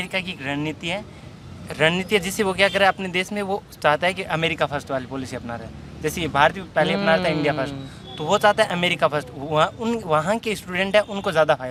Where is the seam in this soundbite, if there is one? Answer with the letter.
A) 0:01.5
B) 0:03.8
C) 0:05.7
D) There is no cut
D